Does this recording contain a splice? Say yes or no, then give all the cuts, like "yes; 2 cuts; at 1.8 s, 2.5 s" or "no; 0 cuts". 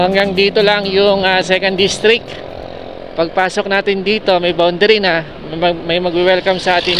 no; 0 cuts